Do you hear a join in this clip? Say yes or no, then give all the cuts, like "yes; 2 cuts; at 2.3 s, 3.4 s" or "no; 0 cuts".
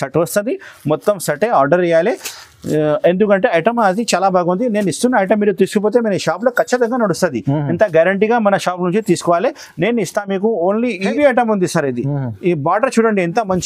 yes; 1 cut; at 11.1 s